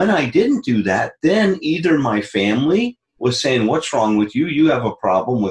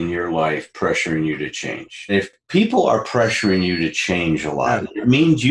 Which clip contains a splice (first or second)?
second